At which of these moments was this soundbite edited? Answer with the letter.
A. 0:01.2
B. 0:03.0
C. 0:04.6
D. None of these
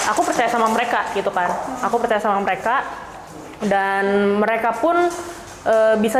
D